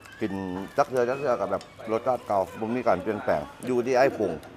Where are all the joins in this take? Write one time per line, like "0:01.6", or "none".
none